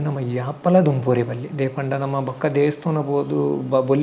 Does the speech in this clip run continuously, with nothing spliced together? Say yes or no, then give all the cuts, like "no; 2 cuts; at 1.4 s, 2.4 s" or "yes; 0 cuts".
yes; 0 cuts